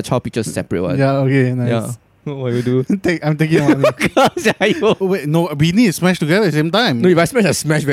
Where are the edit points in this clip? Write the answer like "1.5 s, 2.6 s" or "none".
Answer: 5.0 s